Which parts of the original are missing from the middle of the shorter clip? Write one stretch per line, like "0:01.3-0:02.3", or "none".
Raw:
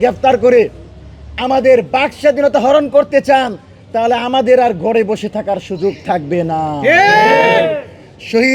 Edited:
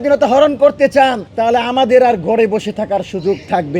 0:03.6-0:03.8